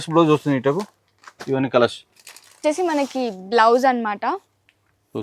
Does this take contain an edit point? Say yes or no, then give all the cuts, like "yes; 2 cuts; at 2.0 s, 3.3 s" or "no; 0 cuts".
yes; 1 cut; at 2.6 s